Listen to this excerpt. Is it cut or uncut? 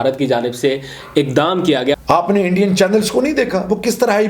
cut